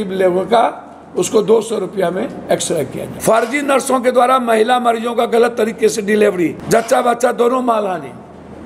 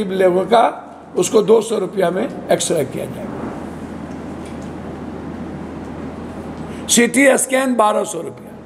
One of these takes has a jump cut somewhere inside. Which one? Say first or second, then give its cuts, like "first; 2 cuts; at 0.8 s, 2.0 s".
first; 2 cuts; at 3.1 s, 6.6 s